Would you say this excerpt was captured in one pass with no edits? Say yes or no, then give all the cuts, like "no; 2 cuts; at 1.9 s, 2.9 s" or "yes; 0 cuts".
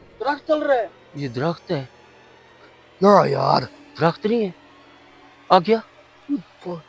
yes; 0 cuts